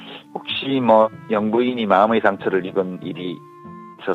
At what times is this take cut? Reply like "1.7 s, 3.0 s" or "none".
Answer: none